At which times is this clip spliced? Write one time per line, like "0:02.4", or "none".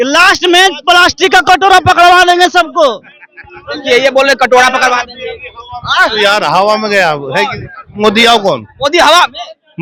none